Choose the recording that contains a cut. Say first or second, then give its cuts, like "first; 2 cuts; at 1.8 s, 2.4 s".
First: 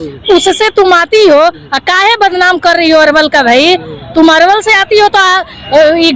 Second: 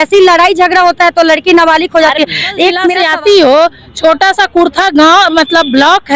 second; 1 cut; at 2.9 s